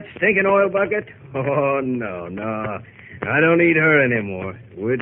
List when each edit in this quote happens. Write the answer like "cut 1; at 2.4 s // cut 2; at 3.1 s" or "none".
cut 1; at 3.9 s